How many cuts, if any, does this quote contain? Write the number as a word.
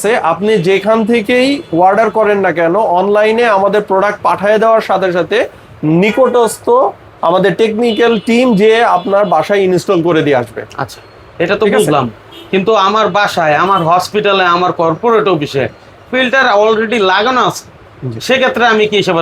zero